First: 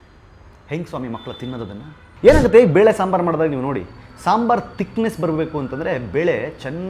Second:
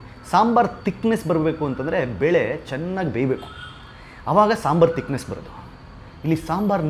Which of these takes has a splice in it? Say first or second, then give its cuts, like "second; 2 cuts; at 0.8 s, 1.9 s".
first; 1 cut; at 2.0 s